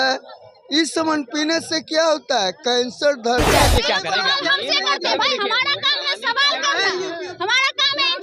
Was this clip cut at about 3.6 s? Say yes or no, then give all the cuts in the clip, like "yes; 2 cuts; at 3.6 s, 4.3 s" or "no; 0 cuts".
yes; 1 cut; at 3.6 s